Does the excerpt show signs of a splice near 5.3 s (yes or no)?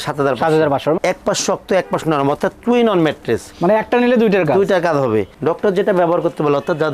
yes